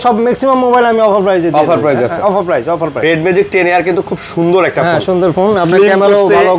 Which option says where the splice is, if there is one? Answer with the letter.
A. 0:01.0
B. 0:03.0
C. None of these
B